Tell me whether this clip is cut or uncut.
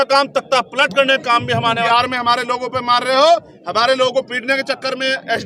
cut